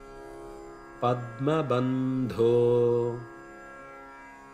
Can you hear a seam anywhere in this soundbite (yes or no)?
no